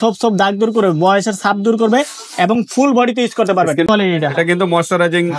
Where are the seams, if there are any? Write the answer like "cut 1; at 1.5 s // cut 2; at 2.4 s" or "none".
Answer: cut 1; at 3.9 s